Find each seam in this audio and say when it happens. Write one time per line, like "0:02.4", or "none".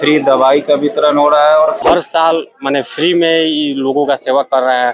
0:01.8